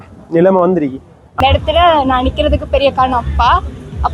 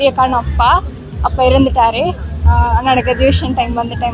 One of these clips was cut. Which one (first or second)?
first